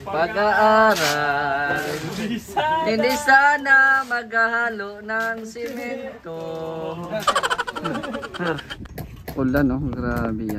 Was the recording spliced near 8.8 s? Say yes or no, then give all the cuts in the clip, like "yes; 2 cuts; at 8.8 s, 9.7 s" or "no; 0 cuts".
yes; 1 cut; at 8.8 s